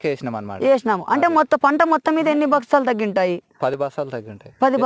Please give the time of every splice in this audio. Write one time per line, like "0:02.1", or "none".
none